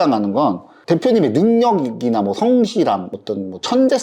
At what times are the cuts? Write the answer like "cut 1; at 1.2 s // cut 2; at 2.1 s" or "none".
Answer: none